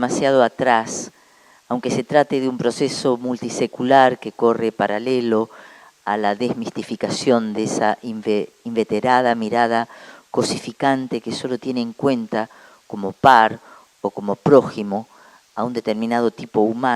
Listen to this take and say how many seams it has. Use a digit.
1